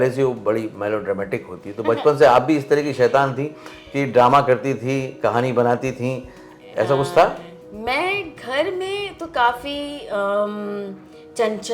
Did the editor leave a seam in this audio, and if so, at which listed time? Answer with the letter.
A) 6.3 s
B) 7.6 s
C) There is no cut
C